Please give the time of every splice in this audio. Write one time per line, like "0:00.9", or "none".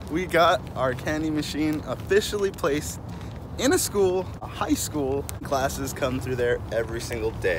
0:04.4
0:05.5